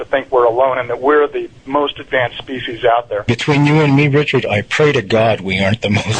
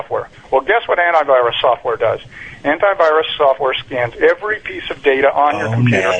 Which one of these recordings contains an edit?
first; 1 cut; at 3.2 s

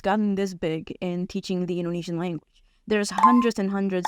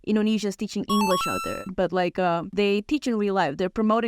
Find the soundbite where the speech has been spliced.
second; 2 cuts; at 1.6 s, 2.5 s

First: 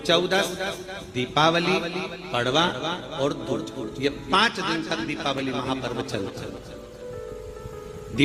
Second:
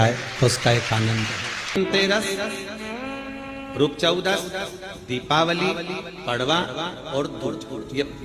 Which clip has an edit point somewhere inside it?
second; 1 cut; at 1.7 s

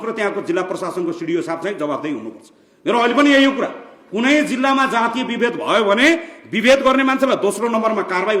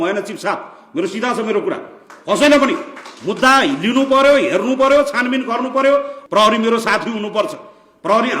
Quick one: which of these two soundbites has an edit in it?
second; 1 cut; at 6.2 s

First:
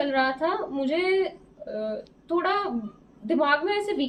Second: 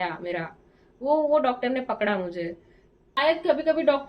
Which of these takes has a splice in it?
second; 1 cut; at 3.2 s

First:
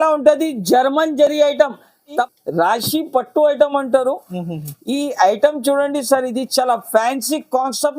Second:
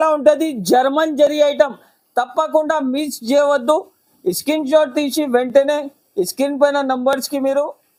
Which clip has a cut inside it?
first; 1 cut; at 2.1 s

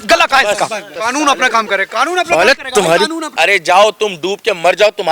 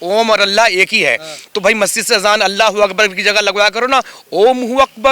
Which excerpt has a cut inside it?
first; 2 cuts; at 0.9 s, 3.3 s

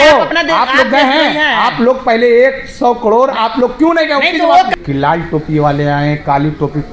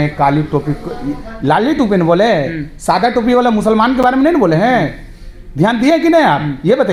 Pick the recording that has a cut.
first; 1 cut; at 4.7 s

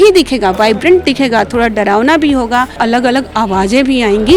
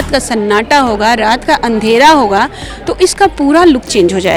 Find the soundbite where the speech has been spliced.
first; 1 cut; at 2.7 s

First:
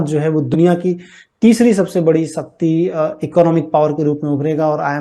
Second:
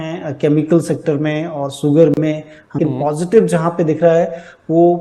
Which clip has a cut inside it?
second; 1 cut; at 2.8 s

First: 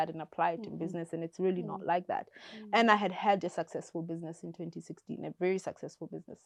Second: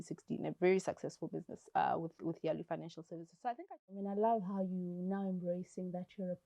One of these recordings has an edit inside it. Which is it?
second; 1 cut; at 3.7 s

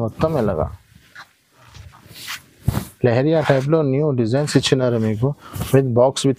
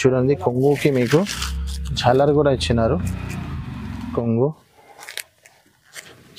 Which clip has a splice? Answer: second; 1 cut; at 4.1 s

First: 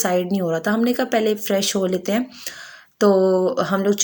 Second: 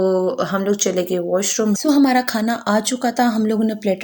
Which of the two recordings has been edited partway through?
second; 1 cut; at 1.8 s

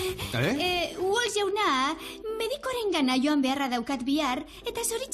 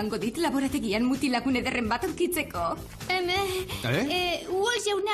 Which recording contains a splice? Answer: first; 1 cut; at 4.2 s

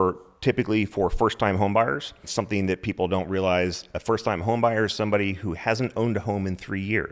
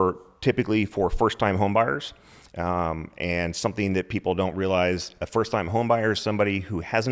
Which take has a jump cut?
first; 1 cut; at 2.3 s

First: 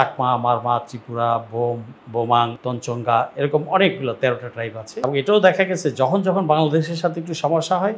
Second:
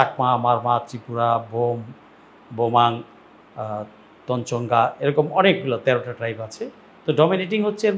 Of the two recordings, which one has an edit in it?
first; 3 cuts; at 1.9 s, 2.6 s, 4.8 s

